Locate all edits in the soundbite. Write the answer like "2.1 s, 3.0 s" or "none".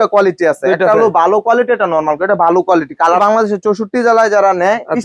3.2 s